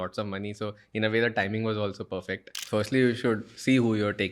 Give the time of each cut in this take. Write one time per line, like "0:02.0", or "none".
0:02.5